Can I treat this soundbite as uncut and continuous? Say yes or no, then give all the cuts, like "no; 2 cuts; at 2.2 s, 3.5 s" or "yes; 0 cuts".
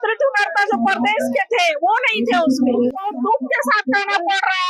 no; 1 cut; at 2.9 s